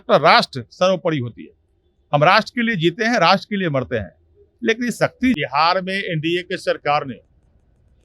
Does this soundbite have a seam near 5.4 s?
yes; 1 cut; at 5.4 s

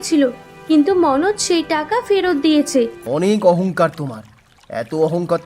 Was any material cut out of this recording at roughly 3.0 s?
yes; 1 cut; at 3.0 s

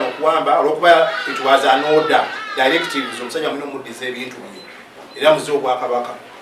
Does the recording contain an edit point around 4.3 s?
no; 0 cuts

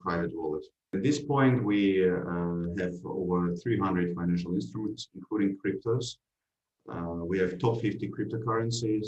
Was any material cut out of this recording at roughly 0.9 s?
yes; 1 cut; at 0.9 s

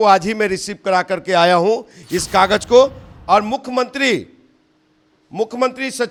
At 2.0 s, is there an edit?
no; 0 cuts

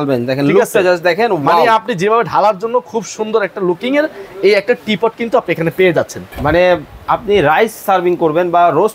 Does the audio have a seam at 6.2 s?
yes; 1 cut; at 6.2 s

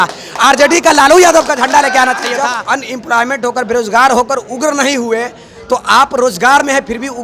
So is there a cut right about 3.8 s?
no; 1 cut; at 2.4 s

